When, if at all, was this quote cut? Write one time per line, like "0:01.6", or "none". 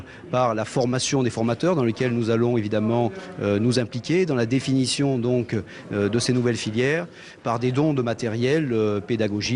none